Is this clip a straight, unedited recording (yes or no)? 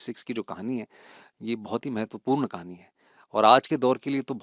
yes